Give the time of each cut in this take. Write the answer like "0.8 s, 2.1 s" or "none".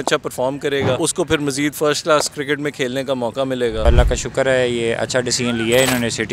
1.0 s, 3.9 s